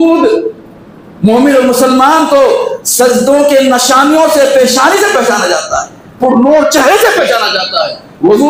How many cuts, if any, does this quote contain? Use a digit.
0